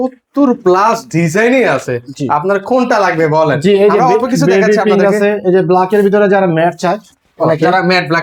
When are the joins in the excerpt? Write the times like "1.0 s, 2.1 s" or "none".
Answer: none